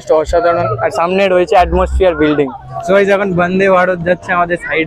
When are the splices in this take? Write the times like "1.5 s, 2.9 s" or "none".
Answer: 2.7 s